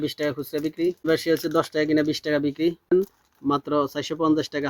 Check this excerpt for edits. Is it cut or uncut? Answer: cut